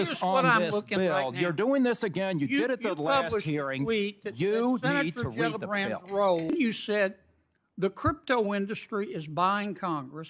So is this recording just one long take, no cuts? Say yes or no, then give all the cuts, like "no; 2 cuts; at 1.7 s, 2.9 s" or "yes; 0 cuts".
no; 1 cut; at 6.5 s